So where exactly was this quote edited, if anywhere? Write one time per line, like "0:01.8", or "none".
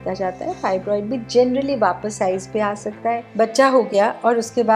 0:03.2